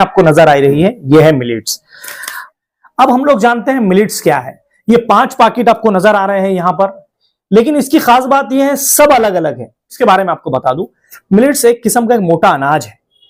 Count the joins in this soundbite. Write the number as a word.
one